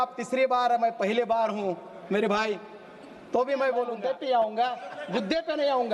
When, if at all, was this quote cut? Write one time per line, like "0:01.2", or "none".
0:04.0